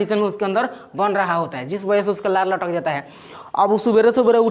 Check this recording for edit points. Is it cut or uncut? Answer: uncut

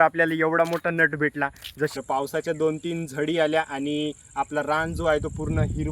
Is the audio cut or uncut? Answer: cut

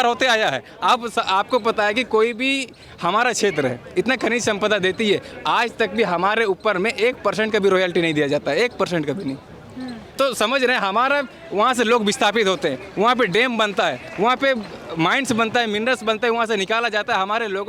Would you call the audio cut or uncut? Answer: uncut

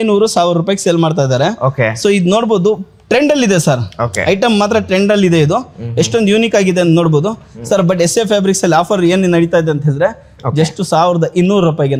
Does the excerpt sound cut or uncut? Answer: uncut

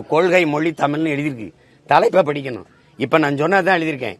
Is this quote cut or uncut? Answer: uncut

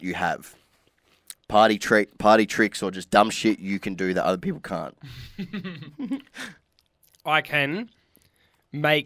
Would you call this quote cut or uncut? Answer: uncut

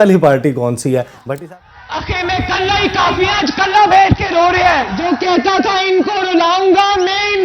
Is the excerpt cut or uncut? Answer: cut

